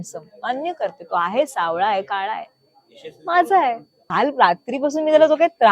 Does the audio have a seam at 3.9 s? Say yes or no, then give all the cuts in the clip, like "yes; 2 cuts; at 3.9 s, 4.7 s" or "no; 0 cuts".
yes; 1 cut; at 3.9 s